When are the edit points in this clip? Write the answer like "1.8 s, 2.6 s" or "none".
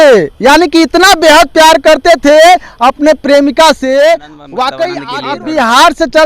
5.0 s